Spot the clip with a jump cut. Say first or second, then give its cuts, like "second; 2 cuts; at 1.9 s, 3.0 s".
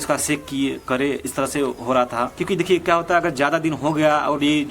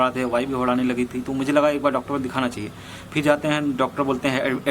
first; 1 cut; at 2.3 s